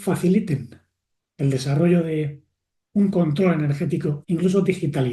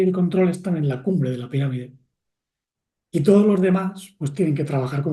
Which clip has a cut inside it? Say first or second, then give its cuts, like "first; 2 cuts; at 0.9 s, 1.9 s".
first; 1 cut; at 4.2 s